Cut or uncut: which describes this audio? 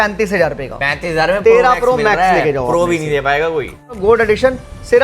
cut